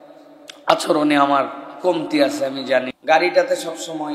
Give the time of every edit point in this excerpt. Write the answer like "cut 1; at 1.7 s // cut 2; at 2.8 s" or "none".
cut 1; at 2.9 s